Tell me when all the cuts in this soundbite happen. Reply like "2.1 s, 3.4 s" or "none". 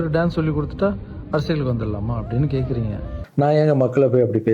3.2 s